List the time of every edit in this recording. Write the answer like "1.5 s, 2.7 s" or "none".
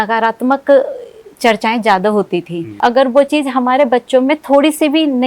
2.7 s